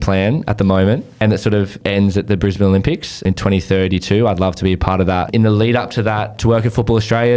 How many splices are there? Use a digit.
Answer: 4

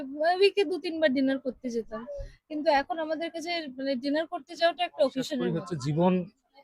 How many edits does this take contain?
1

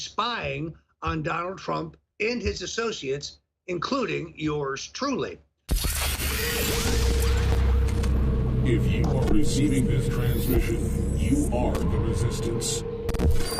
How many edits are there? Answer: 1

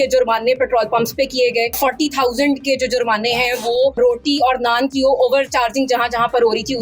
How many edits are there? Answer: 2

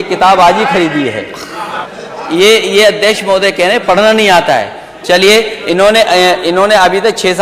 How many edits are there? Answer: 1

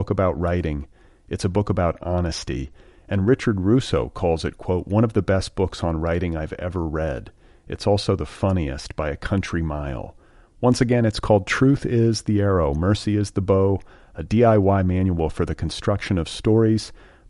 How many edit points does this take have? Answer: 0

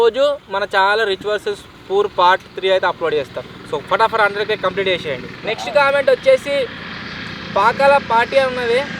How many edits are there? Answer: 0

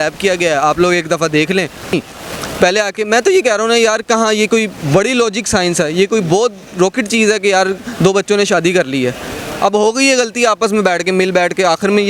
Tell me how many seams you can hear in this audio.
1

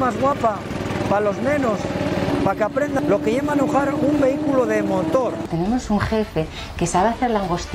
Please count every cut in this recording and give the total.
2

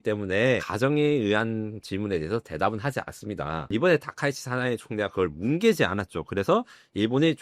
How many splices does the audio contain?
1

